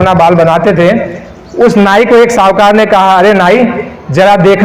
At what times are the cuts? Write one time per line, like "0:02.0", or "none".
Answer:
none